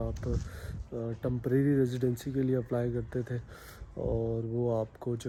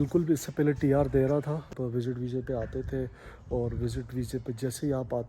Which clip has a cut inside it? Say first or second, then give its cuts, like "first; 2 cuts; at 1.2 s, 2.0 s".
second; 1 cut; at 1.7 s